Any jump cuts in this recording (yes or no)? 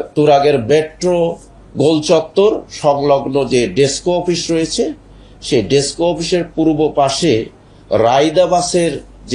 no